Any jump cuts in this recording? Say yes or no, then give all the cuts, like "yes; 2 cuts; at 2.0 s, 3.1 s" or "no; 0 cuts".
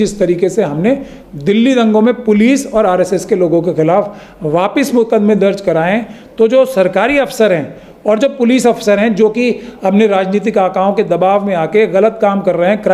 no; 0 cuts